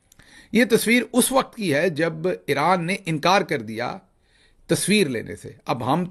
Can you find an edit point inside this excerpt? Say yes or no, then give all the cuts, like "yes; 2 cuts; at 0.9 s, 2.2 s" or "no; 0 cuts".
no; 0 cuts